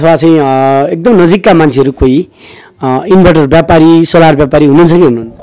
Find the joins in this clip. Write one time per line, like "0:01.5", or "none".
none